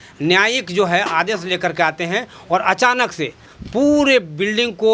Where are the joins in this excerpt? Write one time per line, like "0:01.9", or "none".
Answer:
0:03.5